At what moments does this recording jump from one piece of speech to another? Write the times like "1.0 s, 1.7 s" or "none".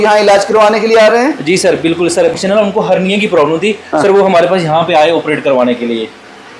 2.4 s